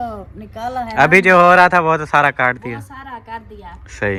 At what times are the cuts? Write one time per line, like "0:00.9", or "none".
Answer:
none